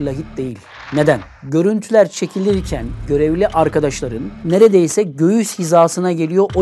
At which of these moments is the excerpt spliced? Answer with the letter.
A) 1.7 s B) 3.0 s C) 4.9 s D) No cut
B